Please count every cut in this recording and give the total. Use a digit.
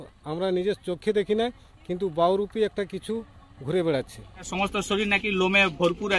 1